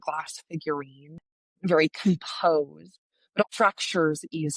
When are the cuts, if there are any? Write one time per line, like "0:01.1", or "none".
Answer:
0:01.1
0:03.4